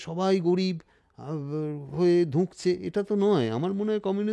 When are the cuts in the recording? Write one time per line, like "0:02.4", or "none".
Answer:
none